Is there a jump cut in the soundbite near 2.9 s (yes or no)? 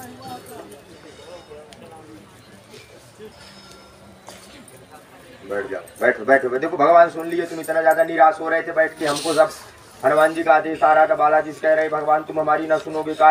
no